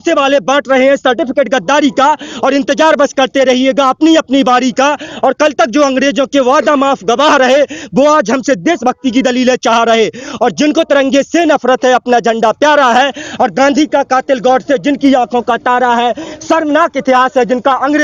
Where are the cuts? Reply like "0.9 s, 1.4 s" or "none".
none

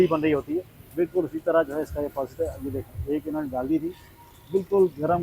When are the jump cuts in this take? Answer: none

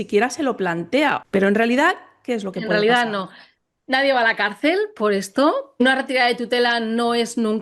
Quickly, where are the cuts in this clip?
1.2 s, 5.8 s

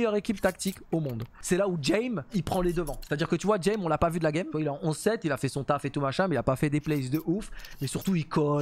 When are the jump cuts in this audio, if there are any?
1.3 s, 2.3 s, 4.5 s

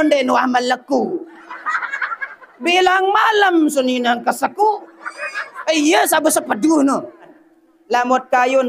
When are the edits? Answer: 7.4 s

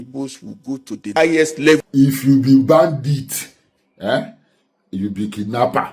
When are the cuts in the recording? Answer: 1.1 s, 1.9 s

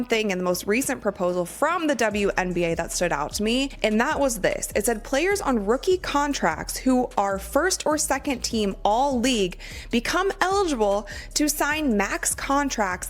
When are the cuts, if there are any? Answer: none

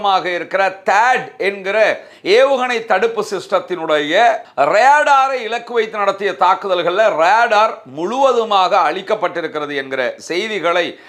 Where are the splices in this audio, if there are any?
none

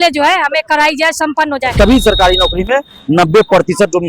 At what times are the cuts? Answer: 1.7 s

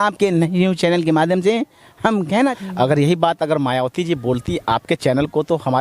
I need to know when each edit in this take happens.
2.5 s

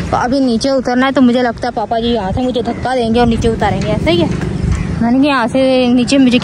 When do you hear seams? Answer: none

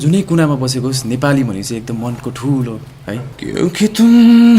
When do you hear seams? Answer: 3.3 s

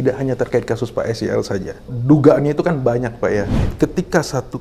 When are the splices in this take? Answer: 1.9 s, 3.6 s

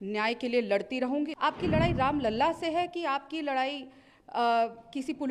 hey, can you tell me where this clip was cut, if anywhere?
1.3 s

